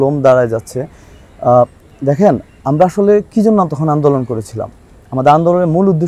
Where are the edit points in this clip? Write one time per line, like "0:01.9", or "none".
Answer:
none